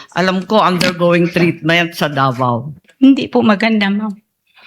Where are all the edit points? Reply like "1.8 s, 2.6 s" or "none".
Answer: 2.8 s